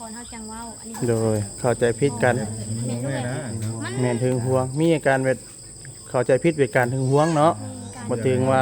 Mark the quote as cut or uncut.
cut